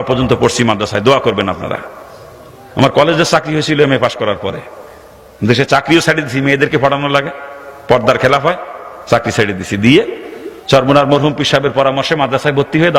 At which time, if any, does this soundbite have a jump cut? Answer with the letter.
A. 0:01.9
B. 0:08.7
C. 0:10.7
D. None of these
D